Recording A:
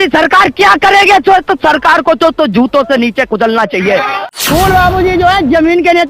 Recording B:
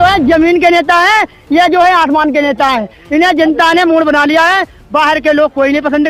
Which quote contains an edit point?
A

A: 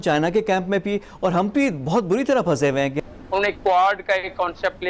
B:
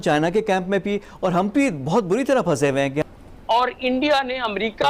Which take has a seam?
A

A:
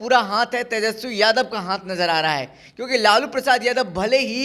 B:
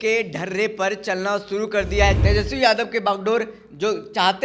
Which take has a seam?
B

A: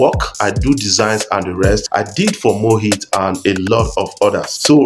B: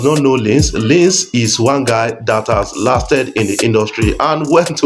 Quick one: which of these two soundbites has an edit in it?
A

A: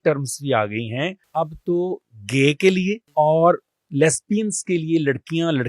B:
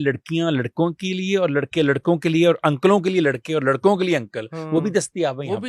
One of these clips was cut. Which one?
A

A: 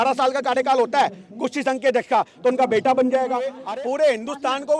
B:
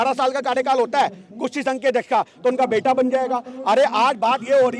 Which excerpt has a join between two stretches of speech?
A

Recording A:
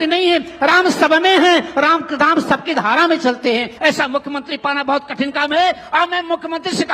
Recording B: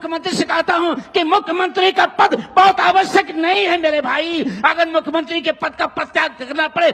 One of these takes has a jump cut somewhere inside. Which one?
A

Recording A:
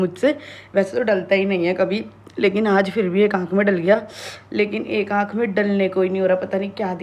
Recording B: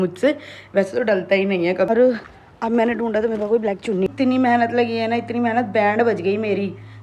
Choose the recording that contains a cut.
B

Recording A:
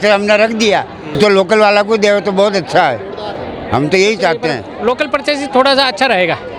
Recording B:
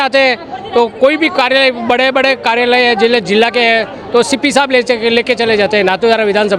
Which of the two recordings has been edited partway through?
A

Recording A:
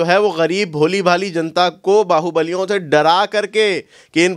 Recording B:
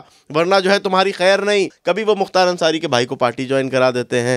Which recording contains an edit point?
B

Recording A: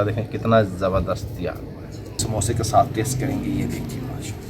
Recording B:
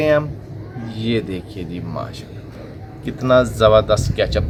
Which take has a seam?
A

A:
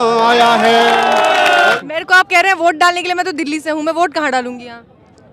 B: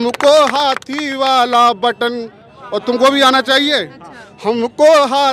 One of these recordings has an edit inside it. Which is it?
A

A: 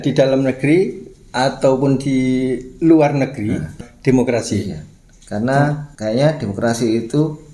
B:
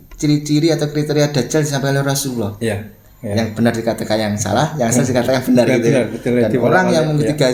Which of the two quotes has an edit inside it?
A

